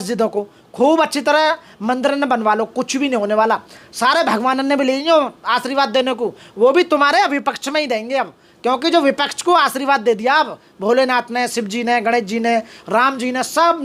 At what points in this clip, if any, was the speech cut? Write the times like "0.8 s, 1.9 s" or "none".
none